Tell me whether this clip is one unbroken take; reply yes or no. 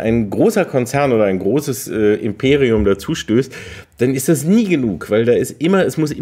yes